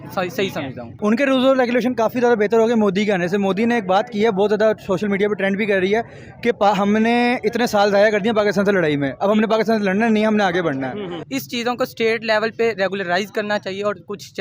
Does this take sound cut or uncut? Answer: cut